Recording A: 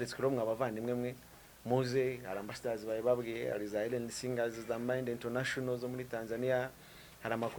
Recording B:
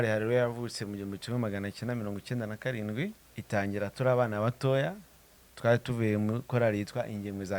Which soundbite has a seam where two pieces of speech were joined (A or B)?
B